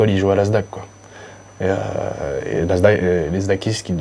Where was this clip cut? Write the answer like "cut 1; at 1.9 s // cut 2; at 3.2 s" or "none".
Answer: none